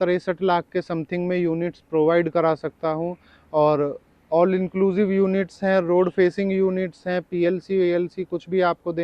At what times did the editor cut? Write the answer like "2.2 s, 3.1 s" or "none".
none